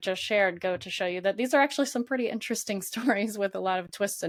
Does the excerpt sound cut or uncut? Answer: uncut